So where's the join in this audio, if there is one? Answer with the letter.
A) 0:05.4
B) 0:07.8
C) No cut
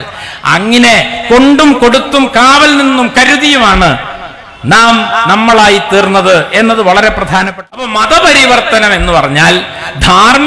B